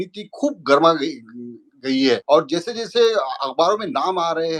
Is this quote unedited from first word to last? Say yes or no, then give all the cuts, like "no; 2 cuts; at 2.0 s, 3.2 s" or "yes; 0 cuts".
no; 1 cut; at 2.2 s